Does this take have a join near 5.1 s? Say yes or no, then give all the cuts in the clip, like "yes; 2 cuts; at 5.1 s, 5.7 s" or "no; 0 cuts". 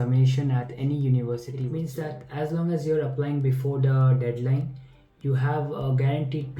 no; 1 cut; at 1.6 s